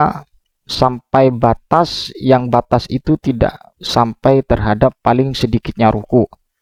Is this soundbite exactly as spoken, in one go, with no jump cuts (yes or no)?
yes